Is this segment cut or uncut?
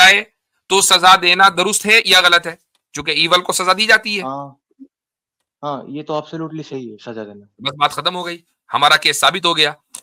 uncut